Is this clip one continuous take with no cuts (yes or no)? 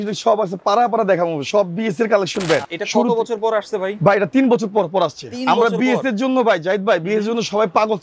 no